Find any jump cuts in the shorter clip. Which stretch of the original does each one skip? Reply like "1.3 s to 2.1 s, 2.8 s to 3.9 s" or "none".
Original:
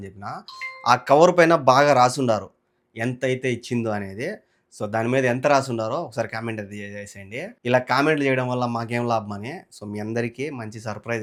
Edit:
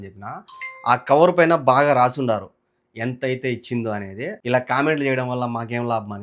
4.4 s to 7.6 s